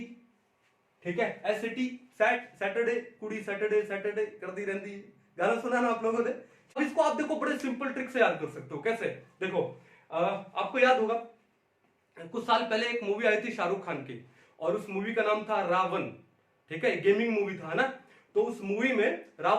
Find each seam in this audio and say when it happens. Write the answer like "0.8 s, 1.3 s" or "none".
6.8 s